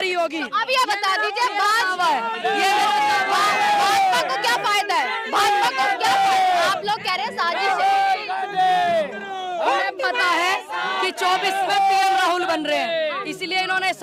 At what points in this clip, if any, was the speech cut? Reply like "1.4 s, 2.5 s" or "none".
none